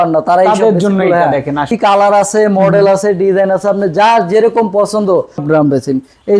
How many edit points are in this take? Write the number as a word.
two